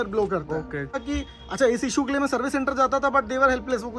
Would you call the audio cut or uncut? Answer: cut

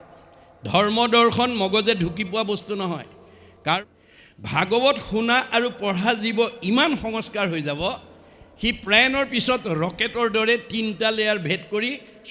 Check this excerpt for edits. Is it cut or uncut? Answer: cut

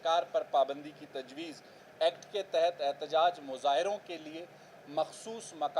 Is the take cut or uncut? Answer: cut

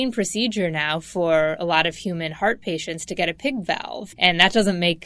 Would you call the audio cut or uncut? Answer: cut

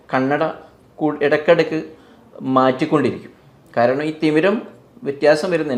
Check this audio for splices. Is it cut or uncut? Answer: uncut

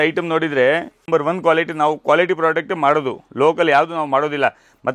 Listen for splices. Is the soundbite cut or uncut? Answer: cut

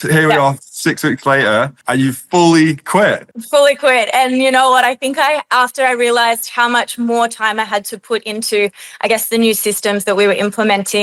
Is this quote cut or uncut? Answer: uncut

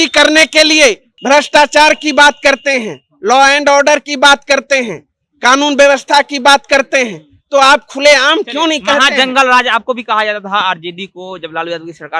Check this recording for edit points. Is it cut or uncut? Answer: cut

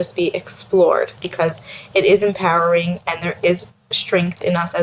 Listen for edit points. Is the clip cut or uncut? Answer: cut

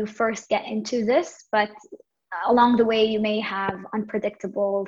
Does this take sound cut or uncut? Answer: uncut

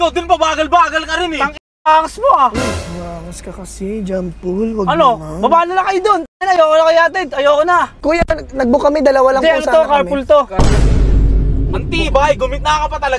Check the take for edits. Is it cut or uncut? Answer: cut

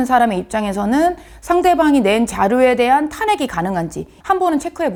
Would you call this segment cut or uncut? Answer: uncut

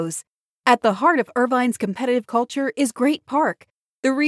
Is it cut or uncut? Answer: uncut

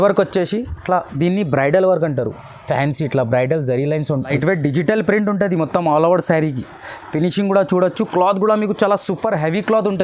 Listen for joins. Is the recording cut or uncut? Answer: cut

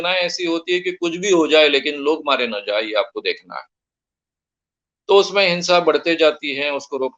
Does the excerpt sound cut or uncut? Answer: uncut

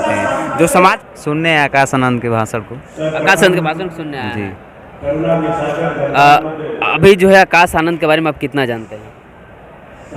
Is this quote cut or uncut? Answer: cut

